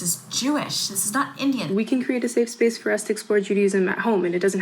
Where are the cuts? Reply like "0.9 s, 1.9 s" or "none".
1.7 s

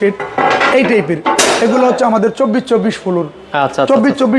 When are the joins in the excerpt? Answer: none

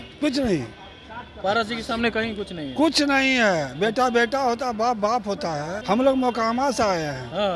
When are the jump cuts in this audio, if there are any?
5.7 s

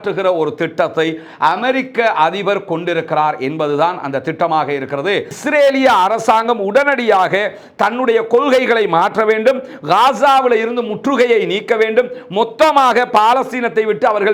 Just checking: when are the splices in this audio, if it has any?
5.3 s

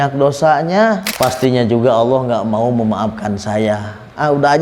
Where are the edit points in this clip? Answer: 1.1 s

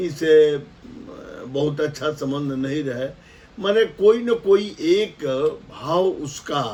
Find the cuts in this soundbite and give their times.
none

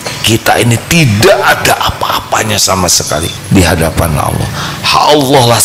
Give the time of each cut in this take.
3.4 s

